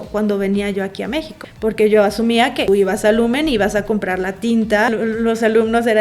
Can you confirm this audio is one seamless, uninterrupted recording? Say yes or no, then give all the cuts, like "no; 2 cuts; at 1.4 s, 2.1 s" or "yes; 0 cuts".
no; 3 cuts; at 1.4 s, 2.7 s, 4.9 s